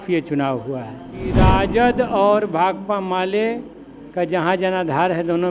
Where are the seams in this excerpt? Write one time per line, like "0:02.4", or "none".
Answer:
0:01.3